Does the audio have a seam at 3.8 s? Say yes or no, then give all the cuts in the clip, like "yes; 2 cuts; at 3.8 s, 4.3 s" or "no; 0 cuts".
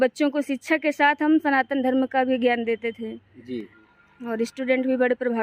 yes; 1 cut; at 3.8 s